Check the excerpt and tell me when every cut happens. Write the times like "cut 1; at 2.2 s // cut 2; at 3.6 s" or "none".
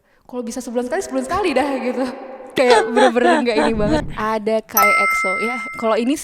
cut 1; at 4.1 s